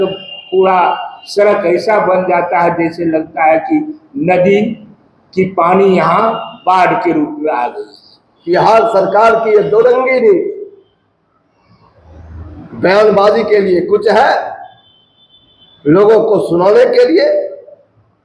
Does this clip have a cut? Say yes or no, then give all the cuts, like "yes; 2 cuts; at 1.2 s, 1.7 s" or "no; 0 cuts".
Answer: yes; 1 cut; at 8.3 s